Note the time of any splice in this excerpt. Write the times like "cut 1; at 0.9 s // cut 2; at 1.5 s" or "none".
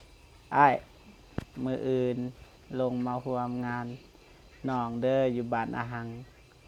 none

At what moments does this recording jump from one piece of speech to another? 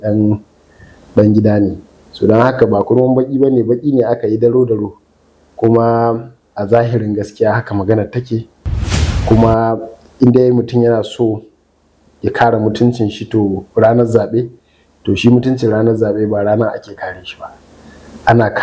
none

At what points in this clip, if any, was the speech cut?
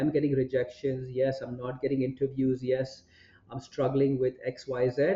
none

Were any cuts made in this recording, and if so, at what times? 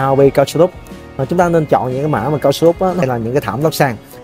cut 1; at 3.0 s

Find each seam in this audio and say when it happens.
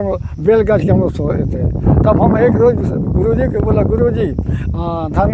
none

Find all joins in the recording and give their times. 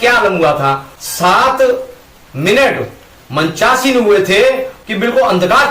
cut 1; at 0.9 s // cut 2; at 4.7 s

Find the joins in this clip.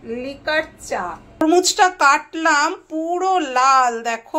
cut 1; at 1.4 s

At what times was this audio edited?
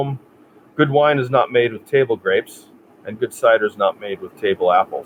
none

